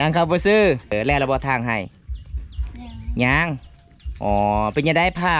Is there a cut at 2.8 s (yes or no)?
no